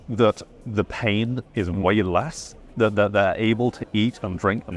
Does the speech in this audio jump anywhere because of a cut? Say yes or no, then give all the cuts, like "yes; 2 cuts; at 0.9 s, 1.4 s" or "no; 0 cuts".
no; 0 cuts